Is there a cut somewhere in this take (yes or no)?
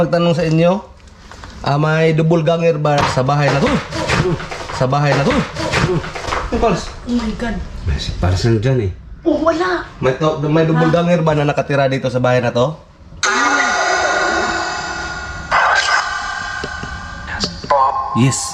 yes